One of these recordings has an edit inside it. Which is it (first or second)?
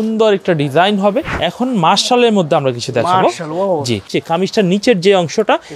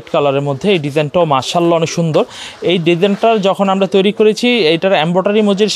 first